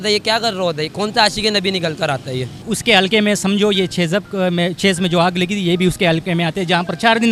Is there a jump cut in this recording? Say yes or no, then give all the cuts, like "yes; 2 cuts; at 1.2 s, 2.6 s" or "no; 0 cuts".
yes; 1 cut; at 2.6 s